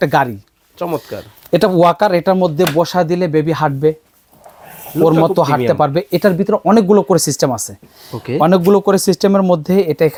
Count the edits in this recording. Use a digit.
0